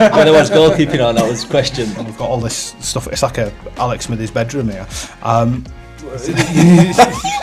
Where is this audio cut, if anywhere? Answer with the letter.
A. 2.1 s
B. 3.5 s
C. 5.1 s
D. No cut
A